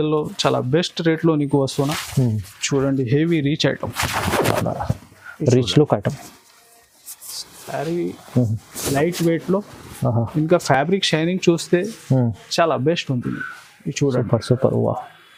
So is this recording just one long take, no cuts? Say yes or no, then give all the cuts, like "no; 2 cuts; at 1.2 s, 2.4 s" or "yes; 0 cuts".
yes; 0 cuts